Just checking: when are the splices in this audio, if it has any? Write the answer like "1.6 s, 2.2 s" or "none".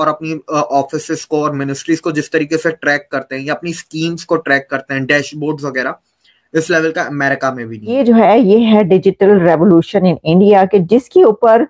7.9 s